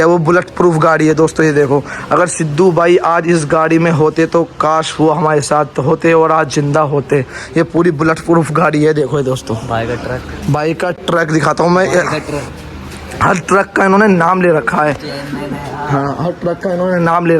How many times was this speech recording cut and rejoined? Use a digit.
0